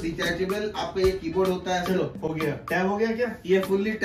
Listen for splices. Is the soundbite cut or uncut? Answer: uncut